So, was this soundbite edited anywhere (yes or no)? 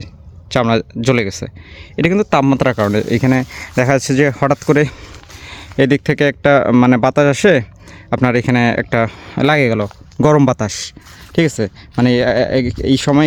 no